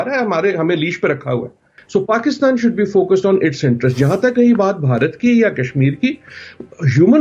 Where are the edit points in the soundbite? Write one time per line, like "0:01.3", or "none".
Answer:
0:01.7